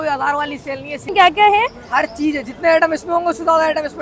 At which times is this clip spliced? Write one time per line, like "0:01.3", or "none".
0:00.9